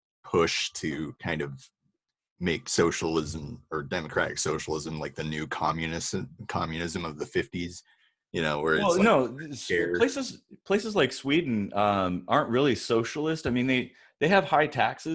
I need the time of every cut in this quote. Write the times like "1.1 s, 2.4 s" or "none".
none